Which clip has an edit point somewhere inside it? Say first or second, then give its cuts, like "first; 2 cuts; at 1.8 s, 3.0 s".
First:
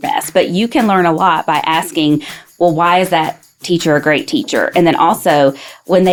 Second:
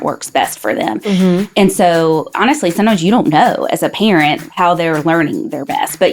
second; 2 cuts; at 2.3 s, 4.5 s